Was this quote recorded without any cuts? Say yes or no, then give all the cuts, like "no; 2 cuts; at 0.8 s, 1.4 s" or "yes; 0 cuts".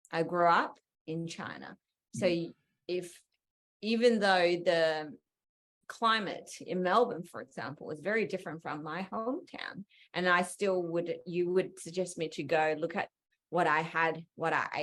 yes; 0 cuts